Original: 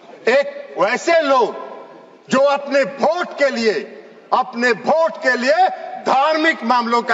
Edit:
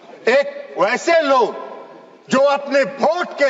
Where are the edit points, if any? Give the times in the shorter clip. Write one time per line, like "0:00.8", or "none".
none